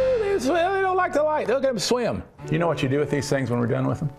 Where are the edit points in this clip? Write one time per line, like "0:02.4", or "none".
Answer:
0:02.3